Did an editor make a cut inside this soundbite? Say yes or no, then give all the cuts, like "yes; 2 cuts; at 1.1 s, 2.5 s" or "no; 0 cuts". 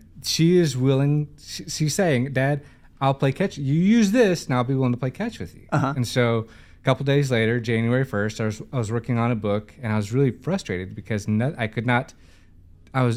no; 0 cuts